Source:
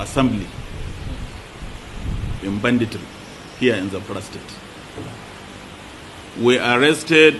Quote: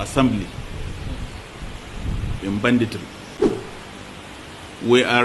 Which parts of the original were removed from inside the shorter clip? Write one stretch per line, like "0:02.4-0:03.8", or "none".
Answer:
0:03.4-0:04.9

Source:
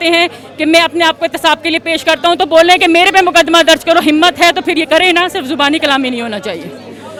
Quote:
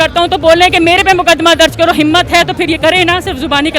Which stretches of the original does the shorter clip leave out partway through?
none

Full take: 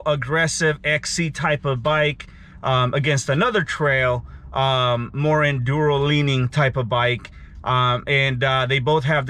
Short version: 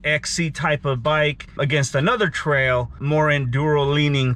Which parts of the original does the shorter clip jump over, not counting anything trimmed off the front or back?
0:02.3-0:02.9
0:04.3-0:05.1

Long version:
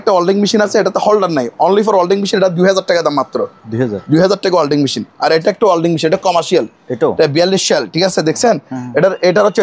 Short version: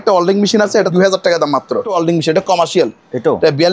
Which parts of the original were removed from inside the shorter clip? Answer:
0:00.9-0:02.5
0:03.6-0:05.7

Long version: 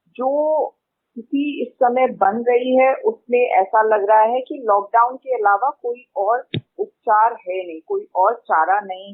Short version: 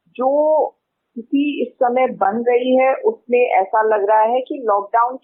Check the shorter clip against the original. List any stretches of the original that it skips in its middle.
none

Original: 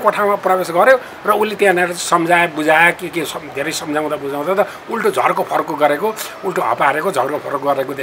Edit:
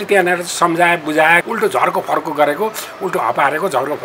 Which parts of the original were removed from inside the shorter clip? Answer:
0:03.0-0:04.9

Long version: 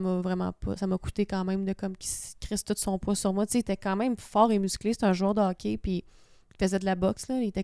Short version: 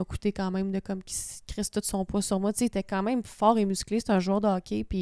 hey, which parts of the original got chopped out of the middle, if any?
none

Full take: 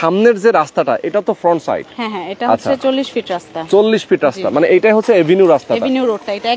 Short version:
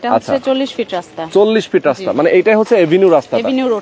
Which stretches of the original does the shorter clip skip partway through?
none

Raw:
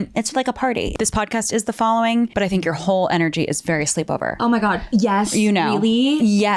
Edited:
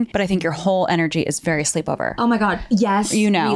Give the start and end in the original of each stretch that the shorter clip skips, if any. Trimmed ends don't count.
none

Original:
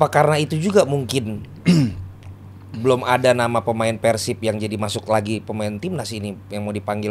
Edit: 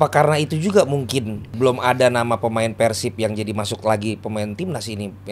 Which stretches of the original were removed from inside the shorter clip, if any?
0:01.4-0:02.6

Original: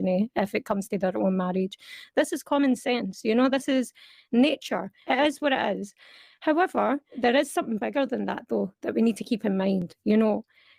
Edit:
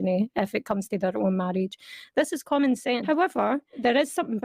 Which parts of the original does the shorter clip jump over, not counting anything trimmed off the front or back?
0:03.0-0:06.4

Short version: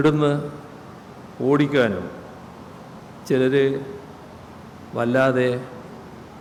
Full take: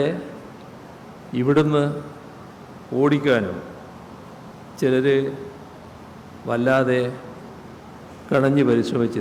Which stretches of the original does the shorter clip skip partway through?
none

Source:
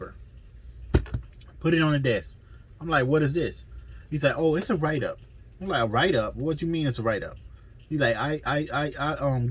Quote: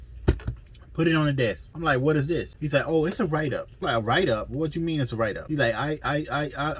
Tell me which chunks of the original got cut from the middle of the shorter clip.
0:02.3-0:02.7
0:03.6-0:04.1
0:05.2-0:05.6
0:07.3-0:07.8

